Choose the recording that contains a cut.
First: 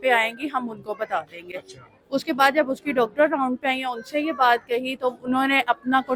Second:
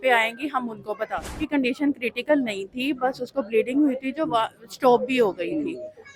second; 1 cut; at 1.4 s

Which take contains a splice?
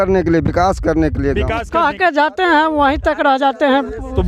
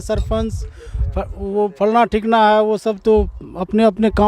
first; 1 cut; at 1.6 s

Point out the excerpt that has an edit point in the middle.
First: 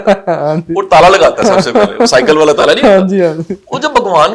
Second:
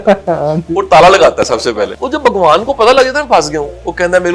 second; 1 cut; at 1.7 s

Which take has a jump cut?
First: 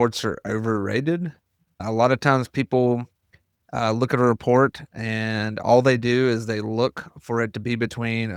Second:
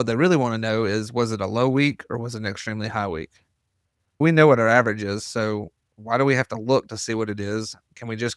second; 1 cut; at 4.2 s

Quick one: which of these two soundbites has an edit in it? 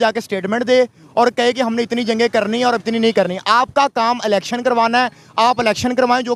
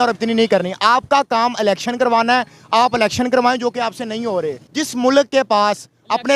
second; 1 cut; at 4.6 s

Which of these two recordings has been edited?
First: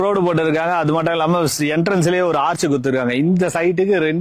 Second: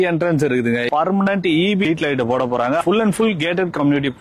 second; 3 cuts; at 0.8 s, 1.8 s, 2.8 s

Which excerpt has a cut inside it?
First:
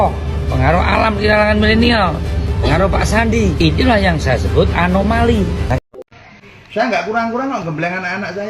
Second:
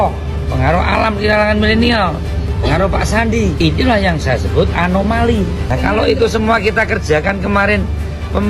first; 1 cut; at 6.1 s

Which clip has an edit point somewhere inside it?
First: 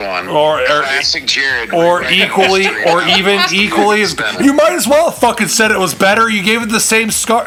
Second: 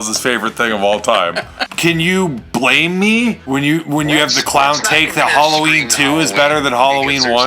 second; 2 cuts; at 1.7 s, 3.4 s

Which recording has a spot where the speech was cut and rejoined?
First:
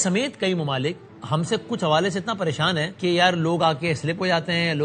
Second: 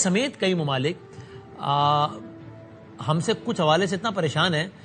first; 2 cuts; at 1.1 s, 2.9 s

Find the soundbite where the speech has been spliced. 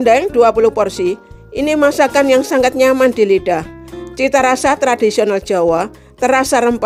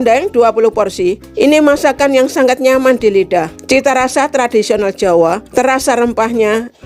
second; 3 cuts; at 1.3 s, 3.6 s, 5.4 s

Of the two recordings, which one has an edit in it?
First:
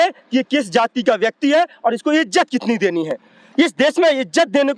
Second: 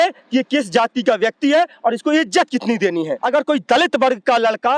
second; 1 cut; at 3.2 s

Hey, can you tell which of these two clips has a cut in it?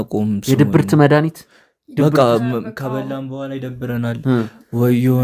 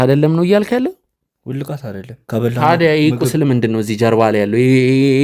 second; 1 cut; at 2.2 s

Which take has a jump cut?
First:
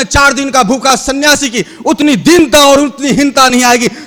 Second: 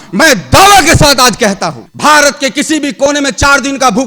second; 1 cut; at 1.9 s

